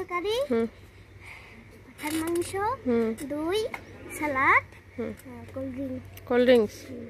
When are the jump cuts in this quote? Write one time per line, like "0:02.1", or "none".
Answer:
none